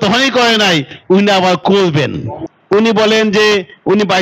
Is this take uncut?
no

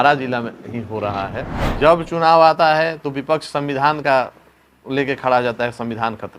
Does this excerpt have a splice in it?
yes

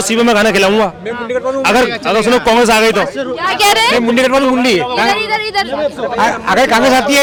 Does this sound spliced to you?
no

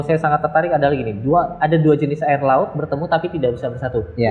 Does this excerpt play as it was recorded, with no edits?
yes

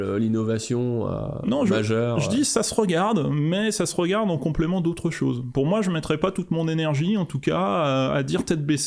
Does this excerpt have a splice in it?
no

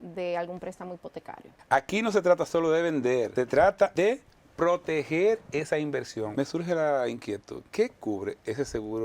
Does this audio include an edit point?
yes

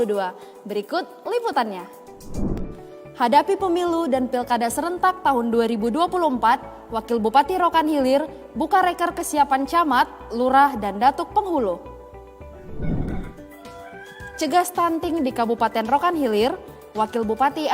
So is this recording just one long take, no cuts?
no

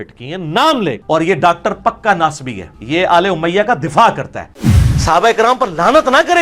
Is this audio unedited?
no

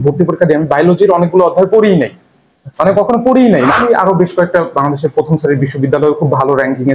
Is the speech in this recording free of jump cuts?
no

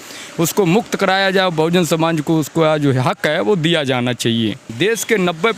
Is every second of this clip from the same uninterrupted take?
no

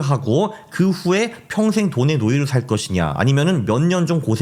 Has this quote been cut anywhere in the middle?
no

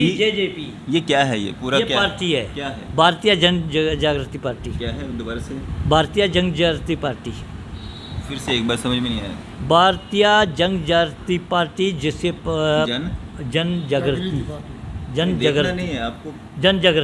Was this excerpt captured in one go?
yes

